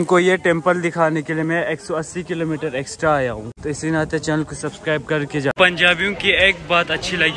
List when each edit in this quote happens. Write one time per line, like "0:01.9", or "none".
0:03.5
0:05.5